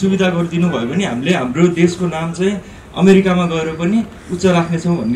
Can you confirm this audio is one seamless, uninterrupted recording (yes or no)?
yes